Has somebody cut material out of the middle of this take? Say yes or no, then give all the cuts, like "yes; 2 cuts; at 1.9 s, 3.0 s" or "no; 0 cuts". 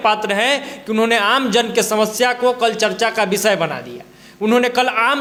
no; 0 cuts